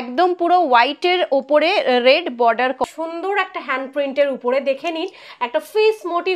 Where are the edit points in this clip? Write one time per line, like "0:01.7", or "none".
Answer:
0:02.8